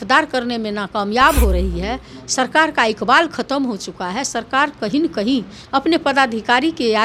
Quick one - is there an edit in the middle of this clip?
no; 0 cuts

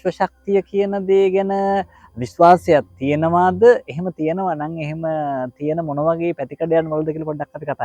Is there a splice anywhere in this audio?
no; 0 cuts

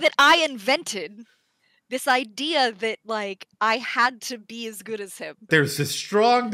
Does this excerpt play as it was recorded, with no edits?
no; 1 cut; at 5.5 s

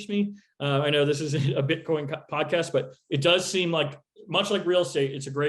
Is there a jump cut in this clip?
no; 0 cuts

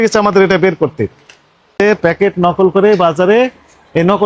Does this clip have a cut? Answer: yes; 1 cut; at 1.8 s

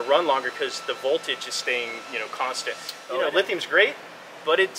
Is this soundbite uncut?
no; 1 cut; at 2.9 s

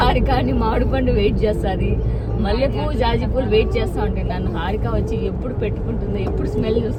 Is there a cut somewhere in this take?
no; 0 cuts

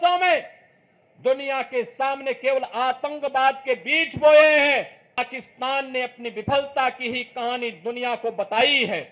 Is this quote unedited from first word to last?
no; 1 cut; at 5.2 s

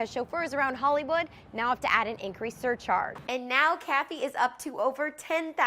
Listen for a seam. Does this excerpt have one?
yes; 1 cut; at 3.2 s

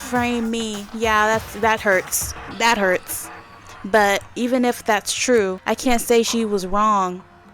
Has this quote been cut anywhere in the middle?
yes; 2 cuts; at 4.3 s, 5.6 s

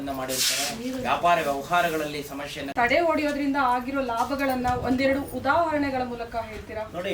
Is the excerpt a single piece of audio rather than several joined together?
no; 1 cut; at 2.8 s

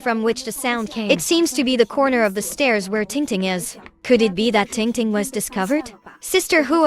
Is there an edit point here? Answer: yes; 1 cut; at 1.0 s

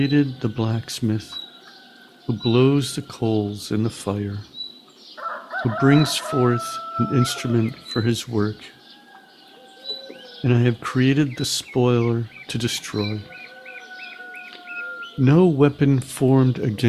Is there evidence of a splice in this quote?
no; 0 cuts

